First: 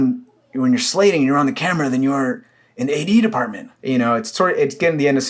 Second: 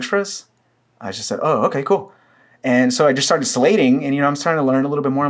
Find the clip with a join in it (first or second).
first